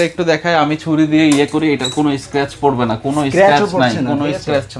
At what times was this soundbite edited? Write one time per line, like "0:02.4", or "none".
none